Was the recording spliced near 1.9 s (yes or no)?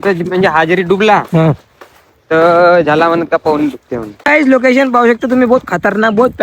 no